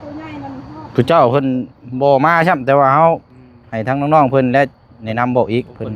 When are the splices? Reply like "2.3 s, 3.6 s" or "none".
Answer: none